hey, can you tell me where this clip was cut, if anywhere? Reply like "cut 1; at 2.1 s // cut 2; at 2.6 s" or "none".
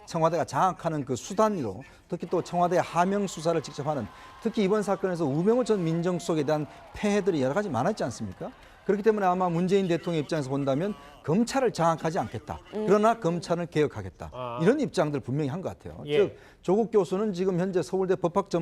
cut 1; at 16.0 s